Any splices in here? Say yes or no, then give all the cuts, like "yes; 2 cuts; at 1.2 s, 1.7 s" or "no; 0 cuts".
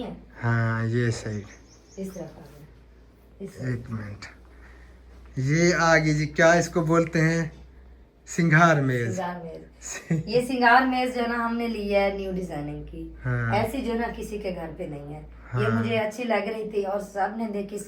no; 0 cuts